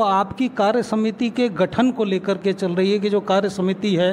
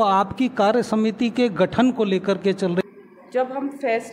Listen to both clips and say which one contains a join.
second; 1 cut; at 2.8 s

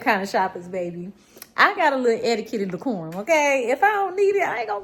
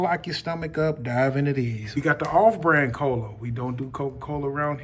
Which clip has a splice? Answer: second; 1 cut; at 1.8 s

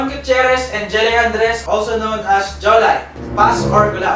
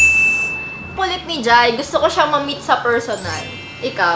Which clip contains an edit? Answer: second; 1 cut; at 0.9 s

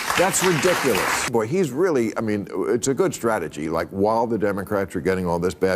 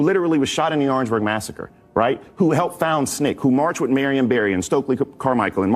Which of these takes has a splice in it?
first; 1 cut; at 1.3 s

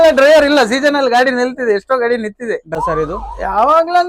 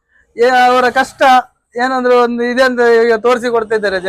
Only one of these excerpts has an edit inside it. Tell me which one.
first; 1 cut; at 2.8 s

